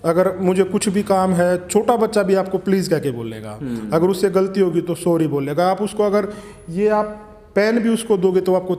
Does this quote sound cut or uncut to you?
uncut